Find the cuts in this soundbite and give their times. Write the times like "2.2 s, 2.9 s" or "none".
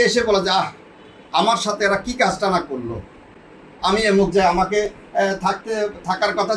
none